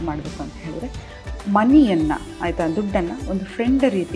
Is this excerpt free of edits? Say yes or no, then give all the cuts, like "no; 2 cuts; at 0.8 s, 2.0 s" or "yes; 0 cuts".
yes; 0 cuts